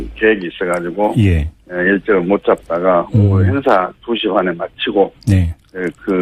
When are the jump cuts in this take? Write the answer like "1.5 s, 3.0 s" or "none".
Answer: none